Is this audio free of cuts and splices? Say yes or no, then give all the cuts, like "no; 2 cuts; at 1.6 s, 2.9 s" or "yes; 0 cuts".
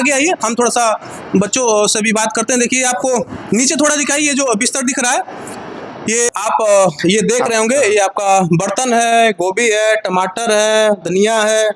no; 1 cut; at 6.3 s